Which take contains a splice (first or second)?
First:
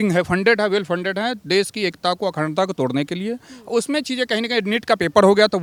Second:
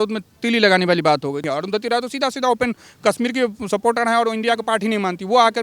second